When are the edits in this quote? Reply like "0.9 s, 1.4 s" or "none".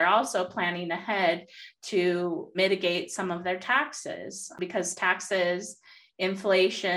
2.5 s, 4.6 s